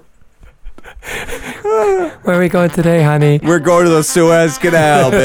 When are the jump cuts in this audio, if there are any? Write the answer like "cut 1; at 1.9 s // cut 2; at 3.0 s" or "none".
cut 1; at 3.5 s